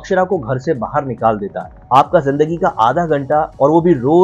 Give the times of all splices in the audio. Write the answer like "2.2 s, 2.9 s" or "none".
1.7 s